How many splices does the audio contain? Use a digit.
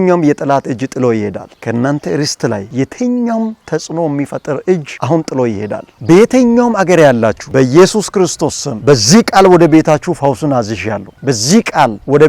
1